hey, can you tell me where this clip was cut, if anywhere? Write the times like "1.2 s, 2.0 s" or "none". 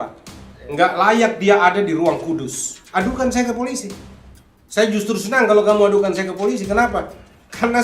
2.7 s